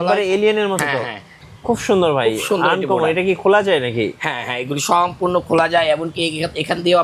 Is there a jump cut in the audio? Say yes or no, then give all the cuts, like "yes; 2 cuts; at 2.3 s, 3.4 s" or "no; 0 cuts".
yes; 1 cut; at 1.4 s